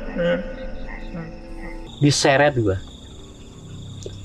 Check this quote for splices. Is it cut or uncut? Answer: cut